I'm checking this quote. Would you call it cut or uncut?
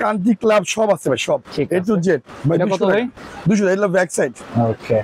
uncut